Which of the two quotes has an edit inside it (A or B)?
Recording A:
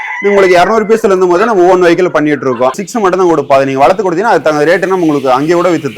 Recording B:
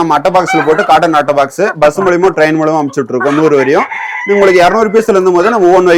A